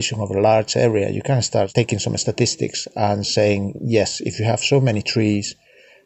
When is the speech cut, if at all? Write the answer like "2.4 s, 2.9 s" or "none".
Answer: 1.7 s